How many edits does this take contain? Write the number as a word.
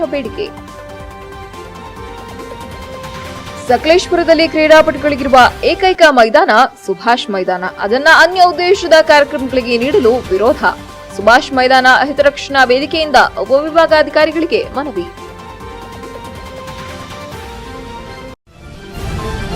one